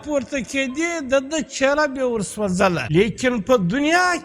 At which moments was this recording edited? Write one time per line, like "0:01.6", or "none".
0:02.8

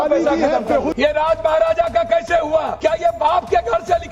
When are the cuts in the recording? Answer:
0:00.9
0:02.7

